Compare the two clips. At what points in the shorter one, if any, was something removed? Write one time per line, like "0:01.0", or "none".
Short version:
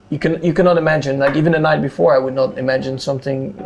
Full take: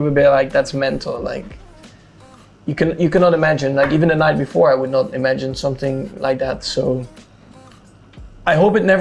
none